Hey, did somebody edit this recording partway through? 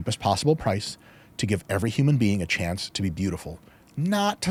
no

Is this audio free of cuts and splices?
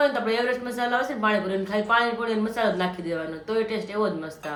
yes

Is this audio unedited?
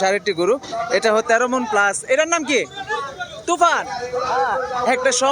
yes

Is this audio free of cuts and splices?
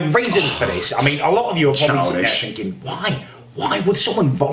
yes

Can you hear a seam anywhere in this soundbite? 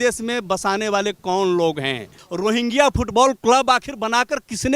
yes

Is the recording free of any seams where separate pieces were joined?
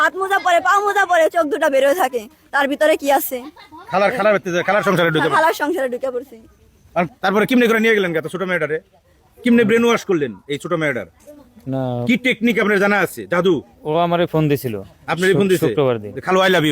no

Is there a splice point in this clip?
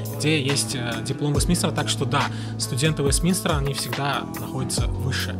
no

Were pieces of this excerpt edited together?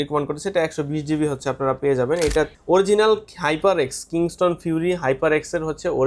yes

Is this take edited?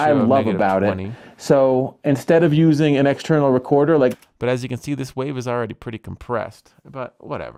no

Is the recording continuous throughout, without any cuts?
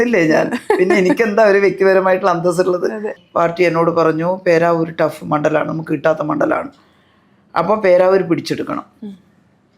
no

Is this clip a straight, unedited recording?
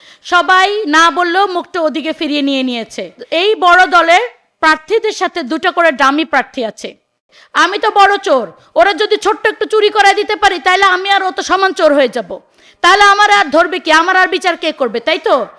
no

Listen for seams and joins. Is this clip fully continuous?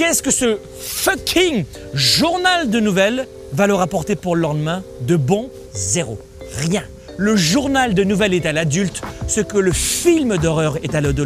no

